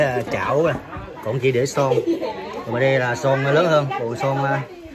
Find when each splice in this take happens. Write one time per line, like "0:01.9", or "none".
none